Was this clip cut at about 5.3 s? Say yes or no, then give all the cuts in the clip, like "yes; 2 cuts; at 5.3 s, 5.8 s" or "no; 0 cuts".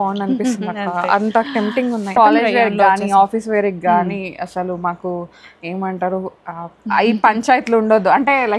no; 1 cut; at 2.2 s